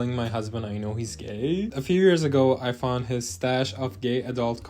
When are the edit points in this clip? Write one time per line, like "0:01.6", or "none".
0:01.7